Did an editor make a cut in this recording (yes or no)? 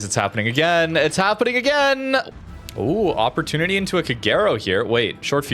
yes